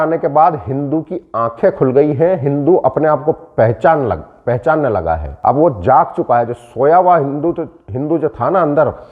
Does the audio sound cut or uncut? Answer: cut